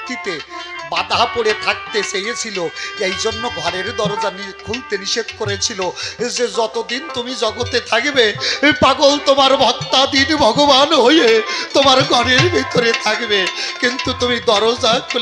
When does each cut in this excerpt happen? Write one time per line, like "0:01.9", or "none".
none